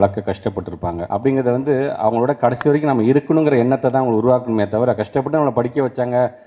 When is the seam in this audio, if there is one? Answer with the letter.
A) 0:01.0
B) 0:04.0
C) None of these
A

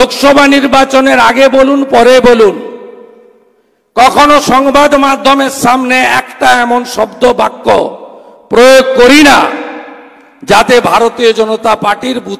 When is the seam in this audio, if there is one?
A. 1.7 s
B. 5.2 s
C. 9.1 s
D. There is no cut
D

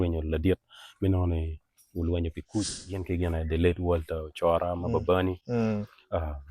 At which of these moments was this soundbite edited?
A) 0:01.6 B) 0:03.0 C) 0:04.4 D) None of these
B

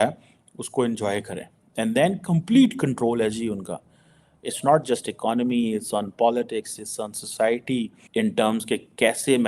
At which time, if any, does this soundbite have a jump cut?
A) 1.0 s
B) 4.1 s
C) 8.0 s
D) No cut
C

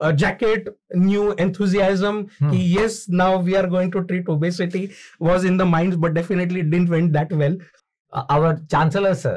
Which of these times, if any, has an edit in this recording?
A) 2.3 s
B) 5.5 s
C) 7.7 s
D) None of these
C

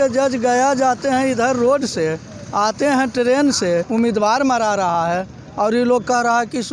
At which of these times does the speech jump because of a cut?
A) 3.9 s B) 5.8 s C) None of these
A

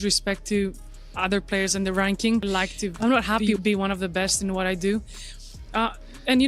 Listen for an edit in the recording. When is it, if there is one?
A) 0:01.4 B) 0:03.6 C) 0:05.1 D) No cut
B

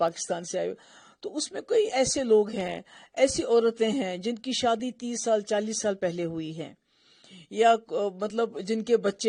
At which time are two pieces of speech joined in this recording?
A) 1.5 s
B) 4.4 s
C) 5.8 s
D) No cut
D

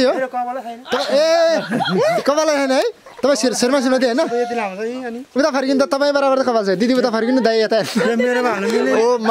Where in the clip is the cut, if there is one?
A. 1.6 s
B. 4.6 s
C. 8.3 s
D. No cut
D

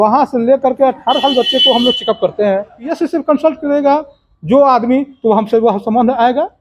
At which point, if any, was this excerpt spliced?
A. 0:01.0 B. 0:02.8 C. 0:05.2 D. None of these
B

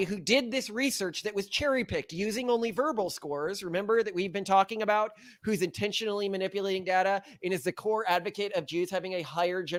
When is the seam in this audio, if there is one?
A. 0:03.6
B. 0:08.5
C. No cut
C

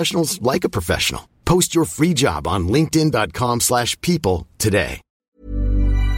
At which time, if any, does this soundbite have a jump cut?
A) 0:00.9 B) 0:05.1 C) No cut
B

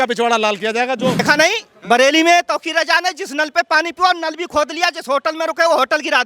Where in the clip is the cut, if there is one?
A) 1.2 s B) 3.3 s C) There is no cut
A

